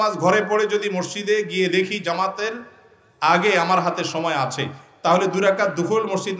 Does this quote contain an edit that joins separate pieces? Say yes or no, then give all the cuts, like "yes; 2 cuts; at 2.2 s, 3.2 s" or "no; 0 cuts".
no; 0 cuts